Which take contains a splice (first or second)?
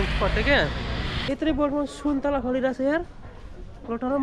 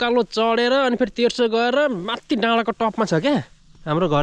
first